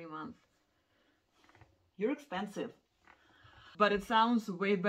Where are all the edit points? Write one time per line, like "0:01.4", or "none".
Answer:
0:03.6